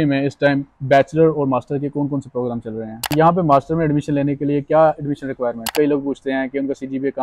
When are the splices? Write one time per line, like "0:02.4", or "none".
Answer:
0:03.1
0:05.7